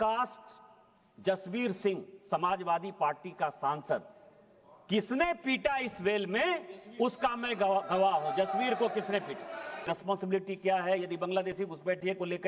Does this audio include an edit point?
yes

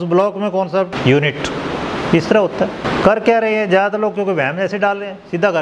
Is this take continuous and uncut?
no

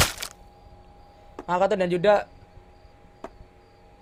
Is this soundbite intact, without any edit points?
yes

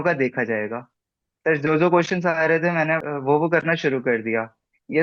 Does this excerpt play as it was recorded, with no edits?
no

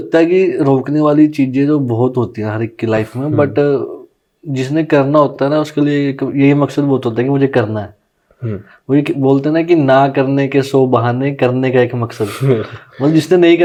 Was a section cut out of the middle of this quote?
no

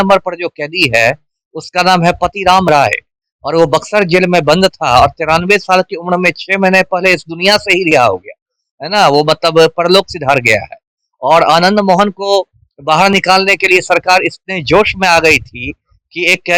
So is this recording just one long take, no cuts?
yes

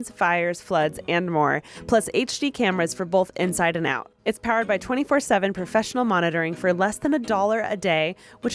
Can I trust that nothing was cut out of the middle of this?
yes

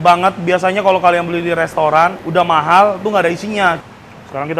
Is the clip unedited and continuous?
no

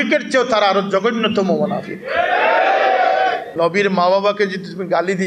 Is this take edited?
yes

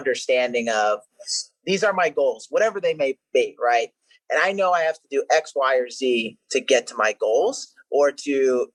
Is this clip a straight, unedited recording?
yes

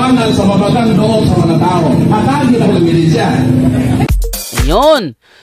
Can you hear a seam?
no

